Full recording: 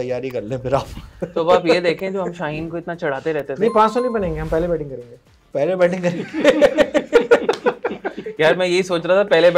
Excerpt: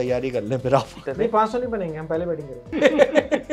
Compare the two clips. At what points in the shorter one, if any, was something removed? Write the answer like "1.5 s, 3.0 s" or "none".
1.0 s, 2.6 s